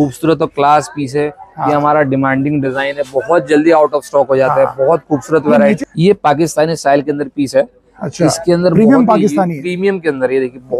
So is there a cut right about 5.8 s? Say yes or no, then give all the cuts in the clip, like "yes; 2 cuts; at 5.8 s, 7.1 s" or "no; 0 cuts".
yes; 1 cut; at 5.8 s